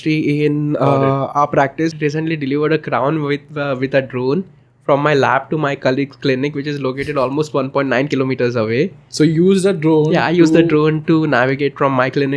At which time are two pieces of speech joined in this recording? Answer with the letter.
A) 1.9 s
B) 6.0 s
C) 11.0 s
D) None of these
A